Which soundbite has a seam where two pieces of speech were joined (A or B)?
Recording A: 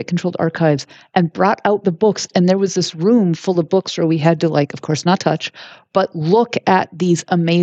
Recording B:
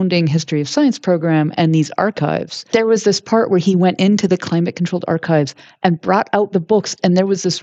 B